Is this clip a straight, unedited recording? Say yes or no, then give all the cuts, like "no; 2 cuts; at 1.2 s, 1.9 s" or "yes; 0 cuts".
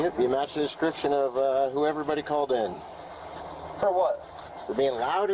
yes; 0 cuts